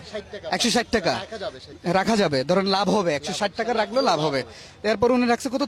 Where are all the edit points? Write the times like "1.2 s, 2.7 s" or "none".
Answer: none